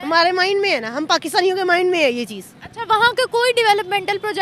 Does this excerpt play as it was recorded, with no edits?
yes; 0 cuts

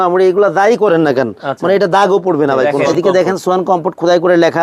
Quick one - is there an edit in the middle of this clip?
yes; 1 cut; at 2.8 s

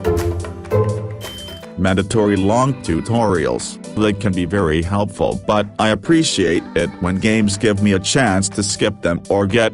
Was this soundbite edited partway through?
yes; 1 cut; at 1.2 s

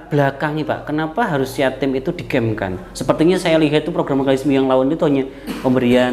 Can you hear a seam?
no; 0 cuts

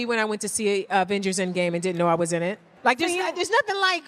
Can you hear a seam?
yes; 1 cut; at 2.7 s

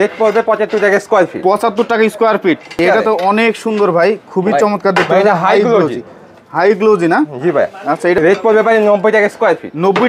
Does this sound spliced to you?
yes; 2 cuts; at 2.8 s, 8.2 s

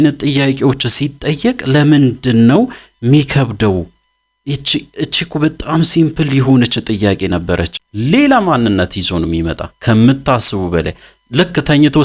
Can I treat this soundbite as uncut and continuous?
no; 1 cut; at 7.9 s

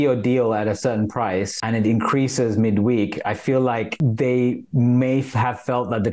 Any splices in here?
no; 0 cuts

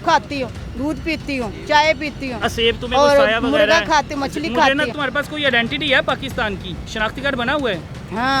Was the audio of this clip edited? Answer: yes; 2 cuts; at 4.9 s, 6.8 s

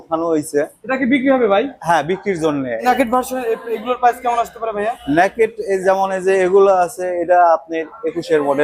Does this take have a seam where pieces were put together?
yes; 1 cut; at 2.8 s

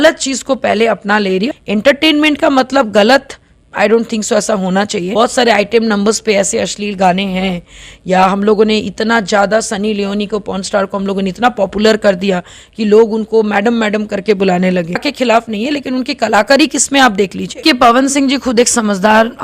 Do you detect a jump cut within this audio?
yes; 4 cuts; at 1.5 s, 5.1 s, 15.1 s, 17.6 s

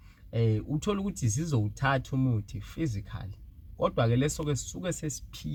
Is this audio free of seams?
yes; 0 cuts

